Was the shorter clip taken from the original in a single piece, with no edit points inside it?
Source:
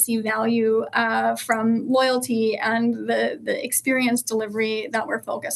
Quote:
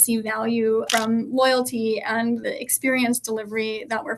no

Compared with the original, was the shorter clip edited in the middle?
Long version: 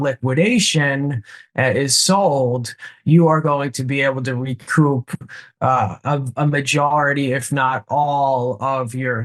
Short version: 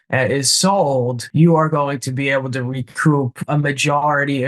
yes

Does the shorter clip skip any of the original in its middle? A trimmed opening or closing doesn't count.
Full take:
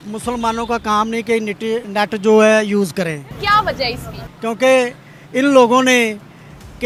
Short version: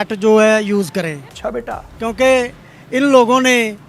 yes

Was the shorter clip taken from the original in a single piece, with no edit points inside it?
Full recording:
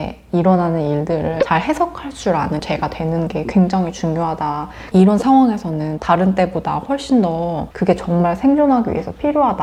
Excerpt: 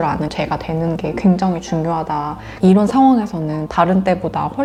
yes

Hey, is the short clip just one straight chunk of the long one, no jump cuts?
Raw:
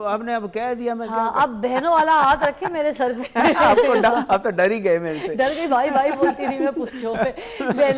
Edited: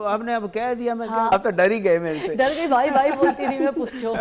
no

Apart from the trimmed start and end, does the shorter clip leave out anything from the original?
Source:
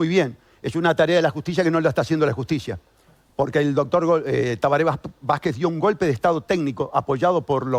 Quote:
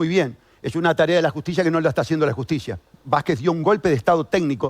yes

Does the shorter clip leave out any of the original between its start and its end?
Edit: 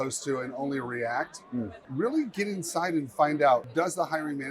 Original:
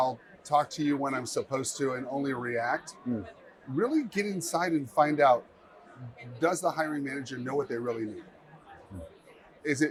yes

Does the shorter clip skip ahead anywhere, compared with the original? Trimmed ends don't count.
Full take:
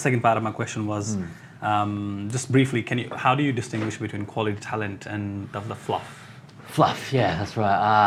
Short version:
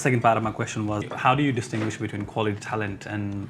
yes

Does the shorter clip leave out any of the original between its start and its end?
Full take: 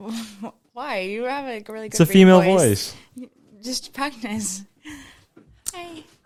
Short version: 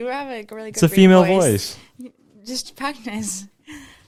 no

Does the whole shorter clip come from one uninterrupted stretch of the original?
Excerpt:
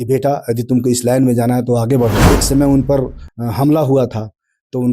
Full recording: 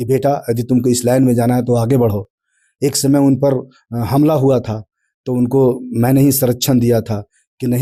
no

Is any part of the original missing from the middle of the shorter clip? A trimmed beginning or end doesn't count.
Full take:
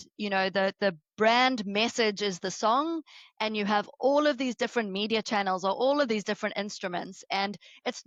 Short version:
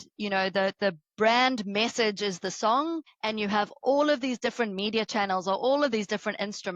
yes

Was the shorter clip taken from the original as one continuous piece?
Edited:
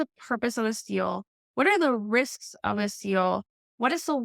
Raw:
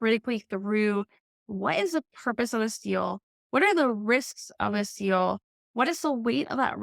yes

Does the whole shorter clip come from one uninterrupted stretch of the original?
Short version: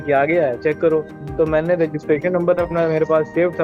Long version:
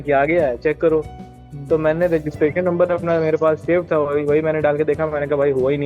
no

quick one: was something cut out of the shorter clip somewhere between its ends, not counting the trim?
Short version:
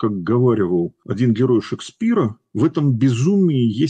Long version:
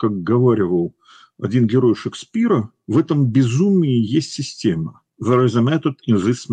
yes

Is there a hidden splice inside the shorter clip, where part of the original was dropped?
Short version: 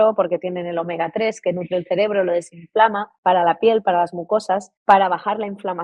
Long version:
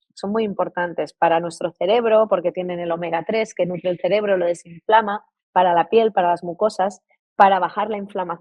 yes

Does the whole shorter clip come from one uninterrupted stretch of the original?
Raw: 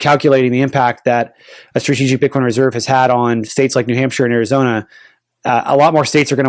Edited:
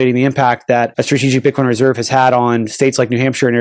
no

